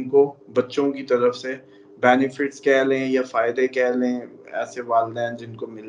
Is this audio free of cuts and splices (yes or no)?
yes